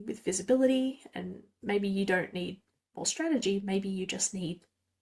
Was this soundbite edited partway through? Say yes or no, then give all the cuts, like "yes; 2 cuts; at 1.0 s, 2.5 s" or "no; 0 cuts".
no; 0 cuts